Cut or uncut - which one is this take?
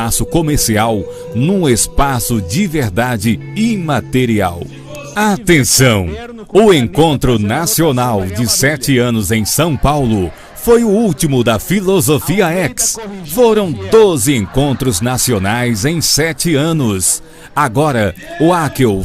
cut